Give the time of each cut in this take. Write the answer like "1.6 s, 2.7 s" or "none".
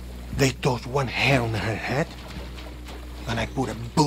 none